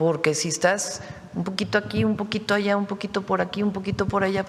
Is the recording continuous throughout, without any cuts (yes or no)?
yes